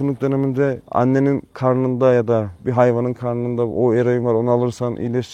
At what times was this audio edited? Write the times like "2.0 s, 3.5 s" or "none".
0.8 s, 1.5 s, 2.6 s